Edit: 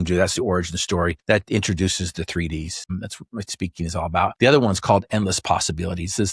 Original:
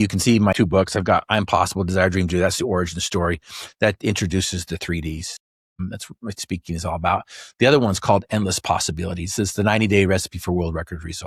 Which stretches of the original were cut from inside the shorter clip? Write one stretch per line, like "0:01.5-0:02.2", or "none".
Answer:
0:03.4-0:03.7
0:05.3-0:05.7
0:07.2-0:07.5